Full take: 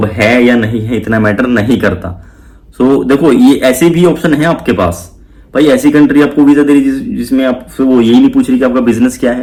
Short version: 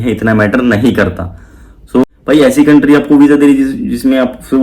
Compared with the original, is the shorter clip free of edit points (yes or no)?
no